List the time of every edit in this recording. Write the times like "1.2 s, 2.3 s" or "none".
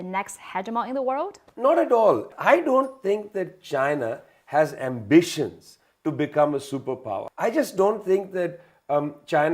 1.4 s, 2.3 s, 7.2 s